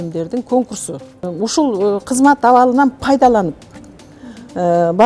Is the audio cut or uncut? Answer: cut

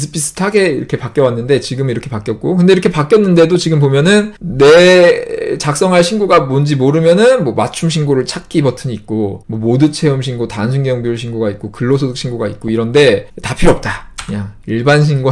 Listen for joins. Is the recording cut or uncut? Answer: uncut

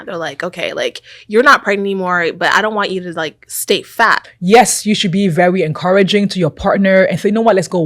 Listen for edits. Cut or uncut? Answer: cut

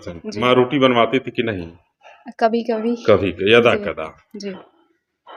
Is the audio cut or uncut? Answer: uncut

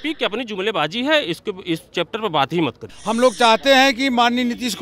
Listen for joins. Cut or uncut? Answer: cut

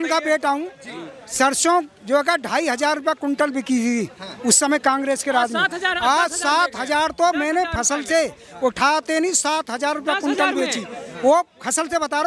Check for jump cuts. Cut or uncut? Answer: uncut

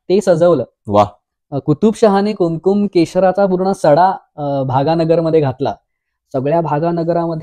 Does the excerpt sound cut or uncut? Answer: uncut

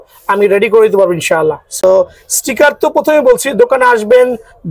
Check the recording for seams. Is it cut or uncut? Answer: uncut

